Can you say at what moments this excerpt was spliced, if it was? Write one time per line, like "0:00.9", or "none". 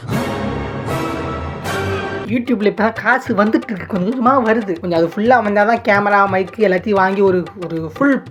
none